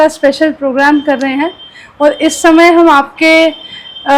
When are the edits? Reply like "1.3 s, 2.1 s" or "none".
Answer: none